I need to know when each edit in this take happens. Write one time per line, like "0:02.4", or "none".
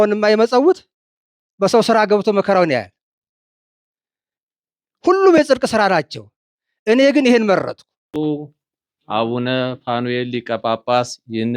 0:08.1